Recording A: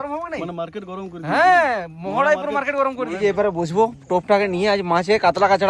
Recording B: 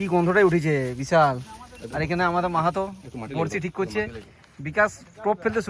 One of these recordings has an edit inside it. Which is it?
A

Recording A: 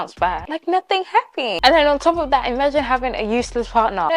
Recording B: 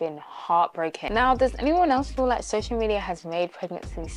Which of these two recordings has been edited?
B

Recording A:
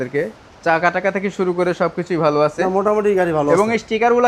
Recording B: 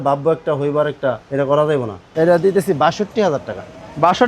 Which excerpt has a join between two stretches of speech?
B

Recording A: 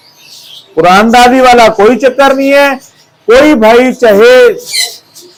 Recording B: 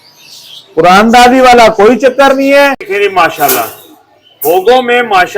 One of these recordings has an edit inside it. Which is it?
B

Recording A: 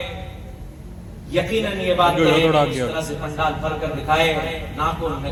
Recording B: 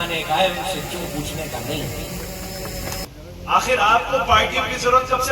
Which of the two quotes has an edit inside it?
B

